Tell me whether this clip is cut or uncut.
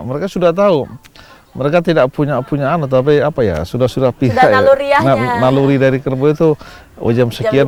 uncut